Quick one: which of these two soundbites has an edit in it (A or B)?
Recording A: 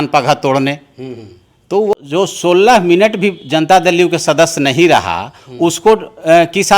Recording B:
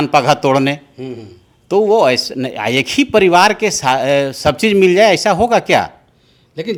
A